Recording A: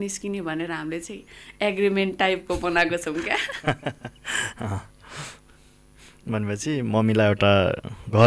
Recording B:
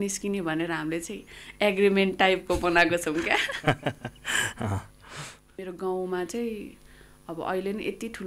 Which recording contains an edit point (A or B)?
B